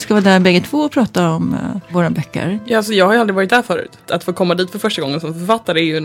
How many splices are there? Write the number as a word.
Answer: two